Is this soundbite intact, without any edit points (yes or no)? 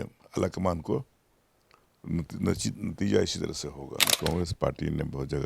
no